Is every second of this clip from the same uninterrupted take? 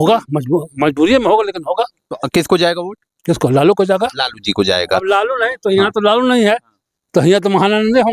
yes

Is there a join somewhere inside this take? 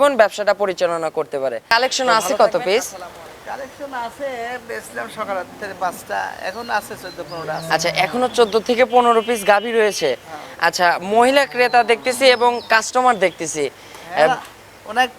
yes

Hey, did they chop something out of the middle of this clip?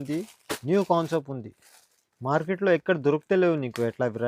no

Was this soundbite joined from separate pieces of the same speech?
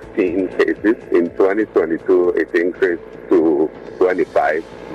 yes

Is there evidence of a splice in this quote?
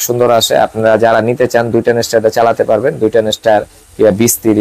no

